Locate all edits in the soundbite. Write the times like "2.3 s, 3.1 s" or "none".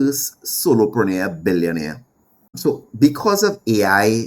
2.6 s